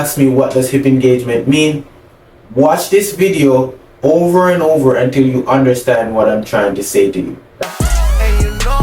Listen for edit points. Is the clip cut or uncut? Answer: cut